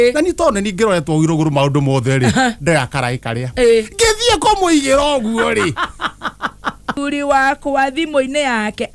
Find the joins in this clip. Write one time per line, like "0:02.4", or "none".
0:06.9